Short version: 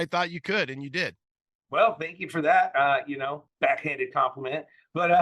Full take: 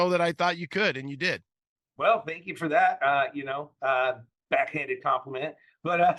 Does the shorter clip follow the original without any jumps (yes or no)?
no